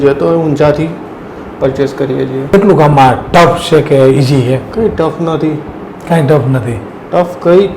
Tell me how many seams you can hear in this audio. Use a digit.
1